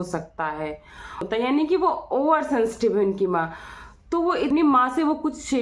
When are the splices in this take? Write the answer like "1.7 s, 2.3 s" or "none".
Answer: 1.2 s, 4.5 s